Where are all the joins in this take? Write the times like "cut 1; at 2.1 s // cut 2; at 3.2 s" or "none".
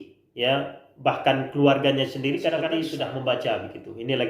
cut 1; at 2.9 s